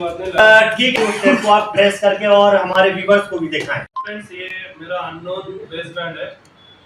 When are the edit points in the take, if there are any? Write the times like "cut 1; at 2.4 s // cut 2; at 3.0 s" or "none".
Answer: cut 1; at 1.0 s